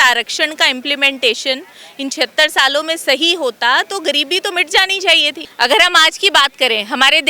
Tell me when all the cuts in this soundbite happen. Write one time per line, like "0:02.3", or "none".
0:05.4